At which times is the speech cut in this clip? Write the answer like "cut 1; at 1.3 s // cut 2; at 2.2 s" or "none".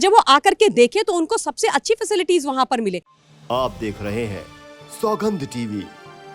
cut 1; at 3.1 s